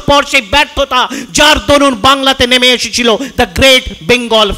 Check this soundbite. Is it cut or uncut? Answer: uncut